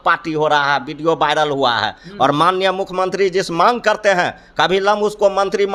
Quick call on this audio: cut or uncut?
uncut